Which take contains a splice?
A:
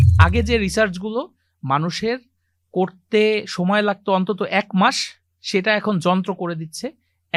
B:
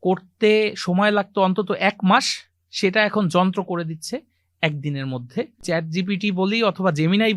B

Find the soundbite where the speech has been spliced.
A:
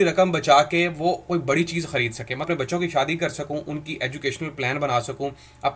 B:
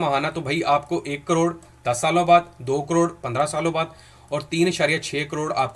A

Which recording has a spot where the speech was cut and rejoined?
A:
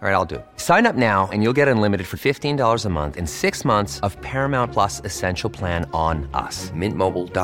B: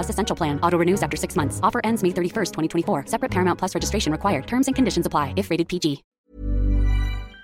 B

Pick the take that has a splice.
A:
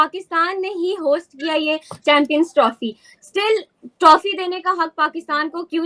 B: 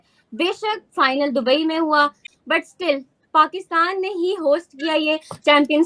B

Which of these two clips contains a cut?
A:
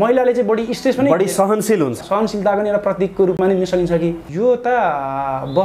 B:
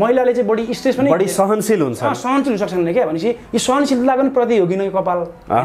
A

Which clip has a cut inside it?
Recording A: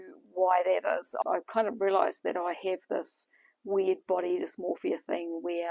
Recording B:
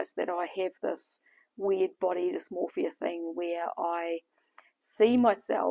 A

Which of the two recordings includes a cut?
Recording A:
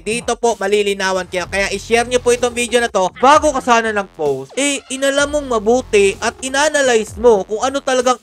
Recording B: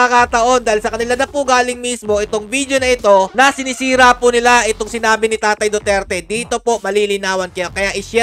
A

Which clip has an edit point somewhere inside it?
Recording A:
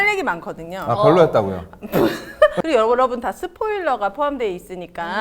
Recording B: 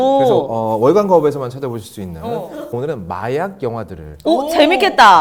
A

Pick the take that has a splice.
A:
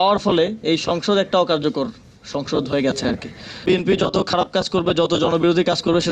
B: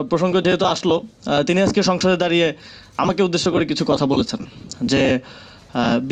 A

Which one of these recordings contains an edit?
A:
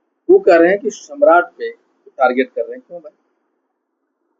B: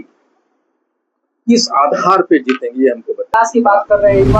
B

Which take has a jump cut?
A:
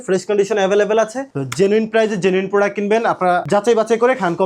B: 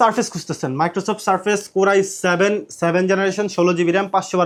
A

